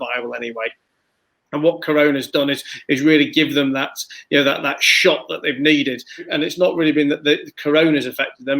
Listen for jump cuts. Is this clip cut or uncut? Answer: cut